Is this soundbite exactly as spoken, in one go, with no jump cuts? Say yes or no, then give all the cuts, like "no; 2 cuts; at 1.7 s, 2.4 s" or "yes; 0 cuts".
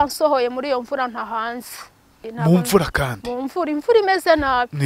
no; 1 cut; at 2.2 s